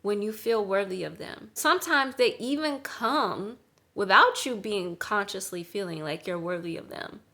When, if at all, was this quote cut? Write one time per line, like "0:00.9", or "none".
0:01.6